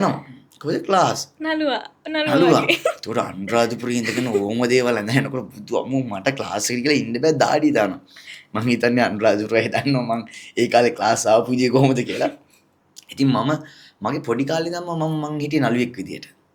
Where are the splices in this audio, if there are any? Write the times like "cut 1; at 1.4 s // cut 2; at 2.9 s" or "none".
none